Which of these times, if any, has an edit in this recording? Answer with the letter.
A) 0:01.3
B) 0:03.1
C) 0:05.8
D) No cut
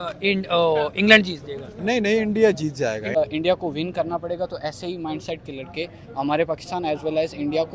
B